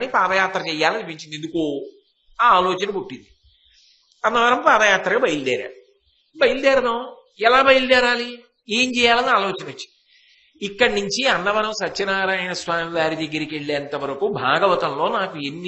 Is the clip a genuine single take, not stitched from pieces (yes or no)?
yes